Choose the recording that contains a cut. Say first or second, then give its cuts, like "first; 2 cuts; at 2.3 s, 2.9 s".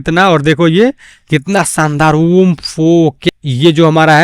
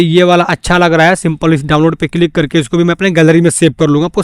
first; 1 cut; at 3.2 s